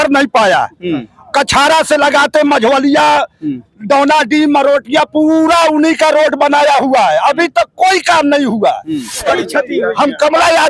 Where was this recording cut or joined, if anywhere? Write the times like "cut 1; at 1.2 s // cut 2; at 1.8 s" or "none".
cut 1; at 9.3 s